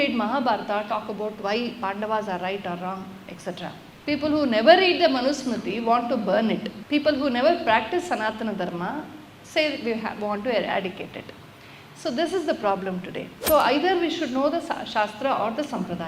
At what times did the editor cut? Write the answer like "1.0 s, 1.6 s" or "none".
3.9 s, 13.4 s